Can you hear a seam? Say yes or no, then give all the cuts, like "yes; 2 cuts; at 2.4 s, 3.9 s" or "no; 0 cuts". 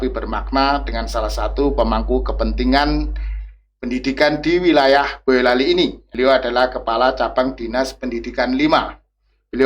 yes; 1 cut; at 6.0 s